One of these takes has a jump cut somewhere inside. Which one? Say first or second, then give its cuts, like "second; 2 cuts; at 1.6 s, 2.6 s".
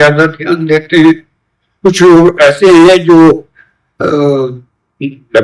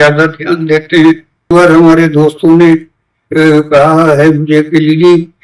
second; 1 cut; at 1.5 s